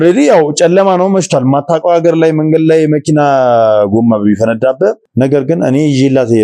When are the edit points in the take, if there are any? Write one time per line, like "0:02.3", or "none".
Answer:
0:05.0